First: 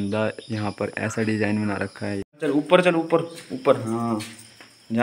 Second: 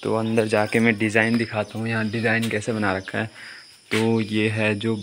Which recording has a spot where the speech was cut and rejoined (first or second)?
first